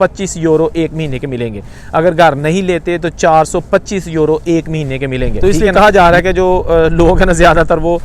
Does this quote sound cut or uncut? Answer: cut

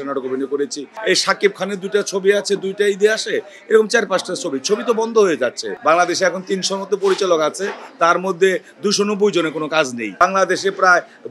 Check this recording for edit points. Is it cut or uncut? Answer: cut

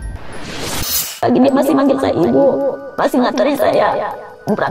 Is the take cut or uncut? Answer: uncut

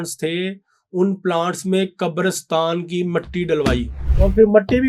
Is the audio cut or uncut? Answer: cut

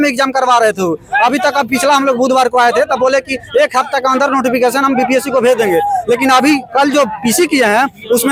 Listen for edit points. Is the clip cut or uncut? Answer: uncut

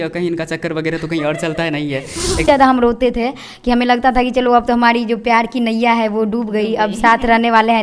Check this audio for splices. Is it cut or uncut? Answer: cut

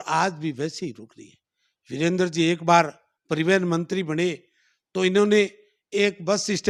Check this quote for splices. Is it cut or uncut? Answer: uncut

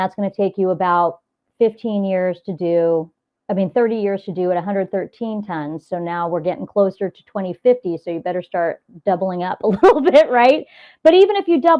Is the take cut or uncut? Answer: uncut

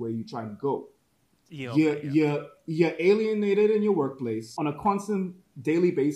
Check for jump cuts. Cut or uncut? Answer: cut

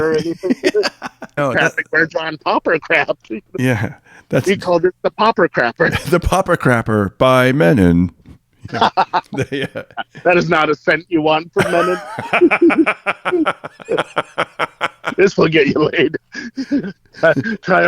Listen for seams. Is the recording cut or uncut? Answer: cut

